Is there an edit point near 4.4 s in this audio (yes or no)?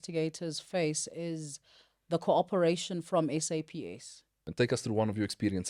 yes